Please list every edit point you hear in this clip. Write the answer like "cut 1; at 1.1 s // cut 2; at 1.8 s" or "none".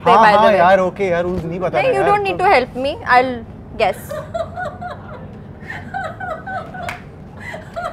none

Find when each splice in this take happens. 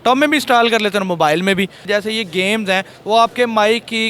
cut 1; at 1.9 s

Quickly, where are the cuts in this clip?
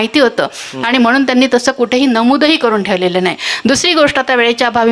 none

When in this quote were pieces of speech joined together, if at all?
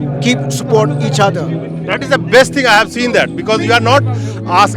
none

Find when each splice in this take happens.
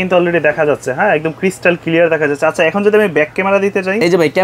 none

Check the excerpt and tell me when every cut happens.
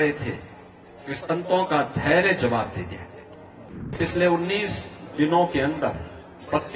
cut 1; at 3.6 s

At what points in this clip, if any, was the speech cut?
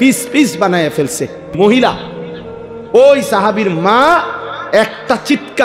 cut 1; at 1.5 s

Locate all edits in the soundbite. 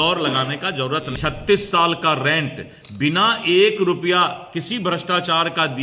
cut 1; at 1.1 s

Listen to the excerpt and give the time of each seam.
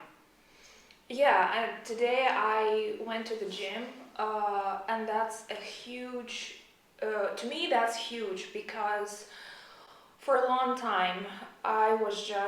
none

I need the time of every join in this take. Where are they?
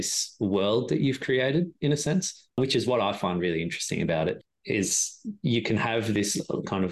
none

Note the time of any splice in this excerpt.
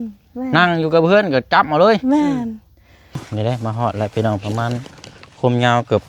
cut 1; at 3.3 s

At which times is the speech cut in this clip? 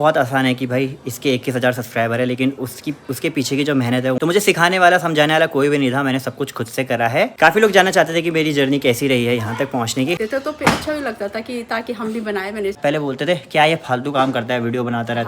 cut 1; at 4.2 s // cut 2; at 7.3 s // cut 3; at 10.2 s // cut 4; at 12.8 s

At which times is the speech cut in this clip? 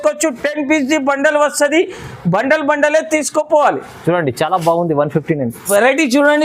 none

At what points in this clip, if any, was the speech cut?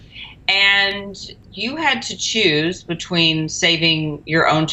none

